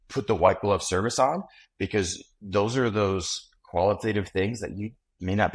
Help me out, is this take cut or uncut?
uncut